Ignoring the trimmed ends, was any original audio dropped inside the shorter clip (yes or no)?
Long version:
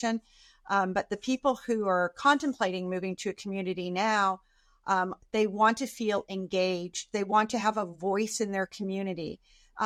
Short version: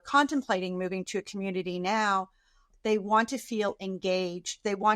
yes